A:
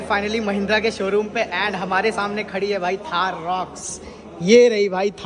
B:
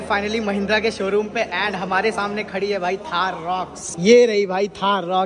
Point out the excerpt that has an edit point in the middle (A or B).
B